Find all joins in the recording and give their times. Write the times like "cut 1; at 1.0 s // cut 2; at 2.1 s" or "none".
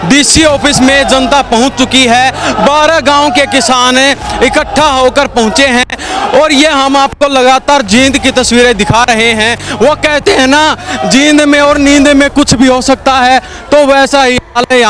none

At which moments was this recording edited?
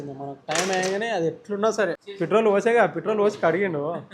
cut 1; at 2.0 s

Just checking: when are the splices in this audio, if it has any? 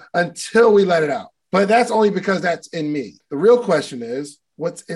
cut 1; at 1.3 s // cut 2; at 3.2 s

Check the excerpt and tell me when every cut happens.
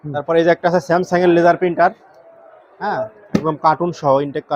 none

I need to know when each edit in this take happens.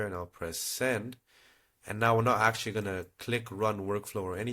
none

